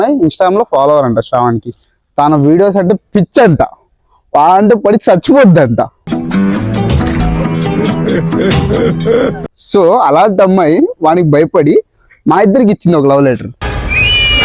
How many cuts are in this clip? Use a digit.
0